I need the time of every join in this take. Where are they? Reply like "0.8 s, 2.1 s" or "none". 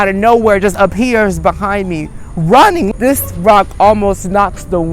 2.9 s